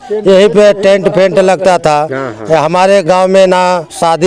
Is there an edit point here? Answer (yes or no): no